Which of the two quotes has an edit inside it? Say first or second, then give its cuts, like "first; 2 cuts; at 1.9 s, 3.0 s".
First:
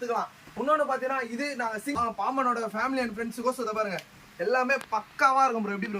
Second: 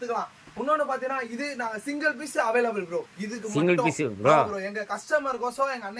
first; 1 cut; at 2.0 s